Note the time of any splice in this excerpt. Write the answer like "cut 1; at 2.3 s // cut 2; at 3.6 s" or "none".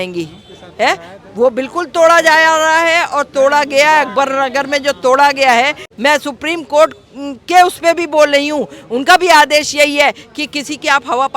cut 1; at 5.8 s